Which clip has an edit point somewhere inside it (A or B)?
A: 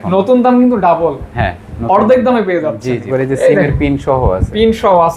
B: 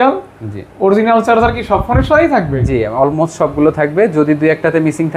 A